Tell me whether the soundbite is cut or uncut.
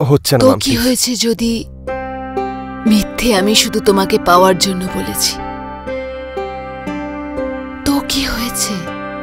uncut